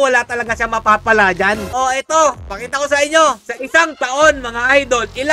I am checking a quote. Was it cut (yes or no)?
yes